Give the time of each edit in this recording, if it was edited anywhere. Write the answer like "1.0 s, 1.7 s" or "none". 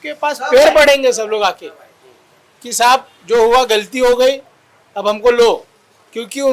none

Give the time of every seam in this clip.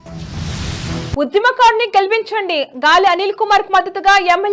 1.1 s

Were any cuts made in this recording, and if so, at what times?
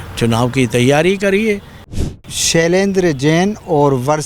2.2 s

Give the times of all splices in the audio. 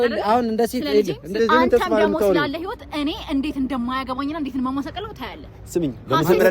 1.4 s

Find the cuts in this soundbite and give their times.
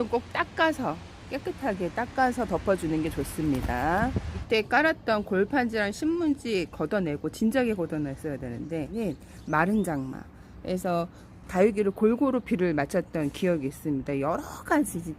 4.4 s, 8.9 s

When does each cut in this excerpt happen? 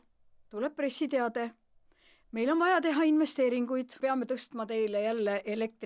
4.0 s

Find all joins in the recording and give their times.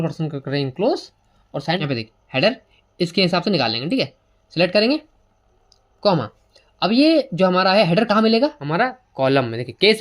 1.8 s, 8.6 s

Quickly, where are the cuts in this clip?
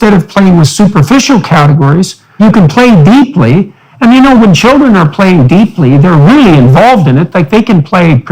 2.4 s

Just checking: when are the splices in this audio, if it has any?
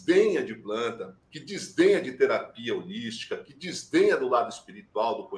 none

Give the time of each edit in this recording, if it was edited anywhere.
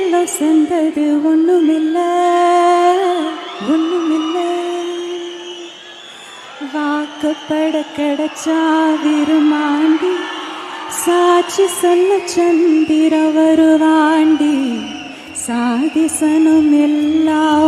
none

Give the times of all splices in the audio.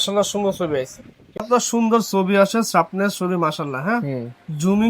1.3 s

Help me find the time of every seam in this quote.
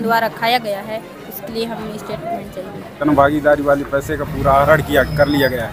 2.9 s

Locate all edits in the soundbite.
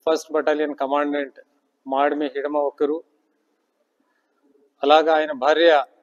5.1 s

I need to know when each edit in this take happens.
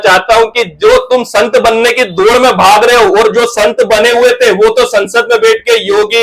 none

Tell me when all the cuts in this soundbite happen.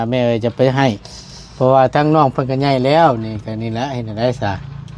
none

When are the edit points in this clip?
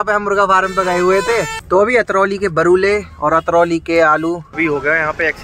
1.6 s, 4.5 s

